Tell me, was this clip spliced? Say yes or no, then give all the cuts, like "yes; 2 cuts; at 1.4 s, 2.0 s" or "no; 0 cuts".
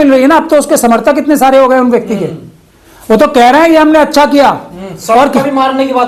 no; 0 cuts